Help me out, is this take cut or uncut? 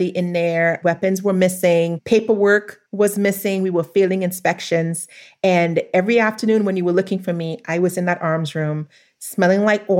uncut